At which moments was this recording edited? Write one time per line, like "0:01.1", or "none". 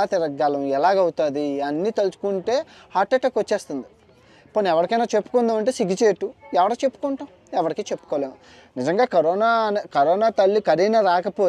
none